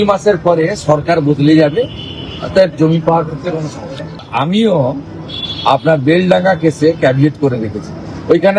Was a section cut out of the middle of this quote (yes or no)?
yes